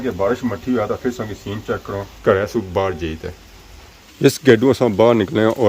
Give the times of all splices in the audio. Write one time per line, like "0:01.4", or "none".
none